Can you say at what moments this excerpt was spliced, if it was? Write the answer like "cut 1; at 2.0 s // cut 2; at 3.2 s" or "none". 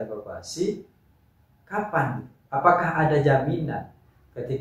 none